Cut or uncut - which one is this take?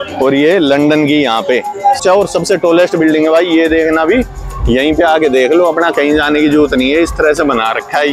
cut